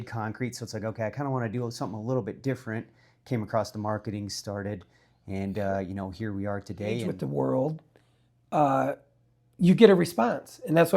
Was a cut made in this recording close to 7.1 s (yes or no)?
yes